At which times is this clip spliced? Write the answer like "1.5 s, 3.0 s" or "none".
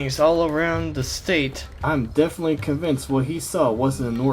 1.7 s

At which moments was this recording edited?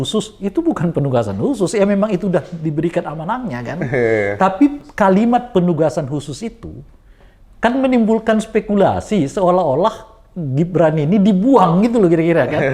none

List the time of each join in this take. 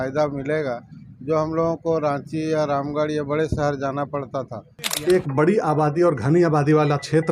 5.1 s

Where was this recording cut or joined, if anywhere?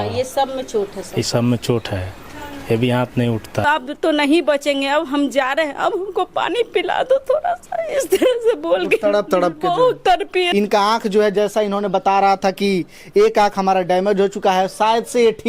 3.6 s, 10.5 s

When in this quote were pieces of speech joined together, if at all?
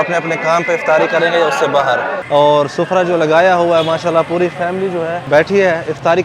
2.1 s, 5.2 s

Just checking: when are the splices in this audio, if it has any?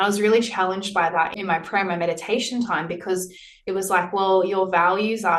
1.4 s

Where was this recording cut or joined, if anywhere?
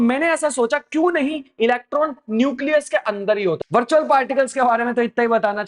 3.6 s

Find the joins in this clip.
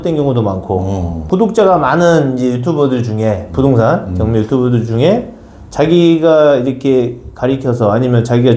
1.2 s

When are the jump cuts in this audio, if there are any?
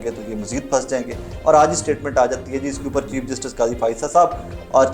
1.2 s

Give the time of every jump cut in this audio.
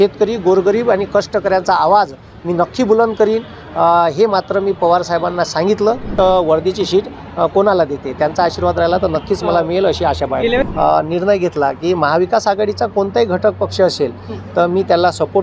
6.1 s, 10.7 s

